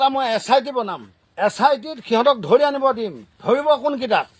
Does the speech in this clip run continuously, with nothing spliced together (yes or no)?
yes